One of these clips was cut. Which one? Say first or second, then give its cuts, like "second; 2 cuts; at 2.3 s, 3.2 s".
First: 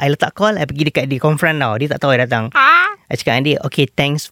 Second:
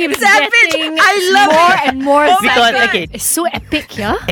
second; 1 cut; at 3.1 s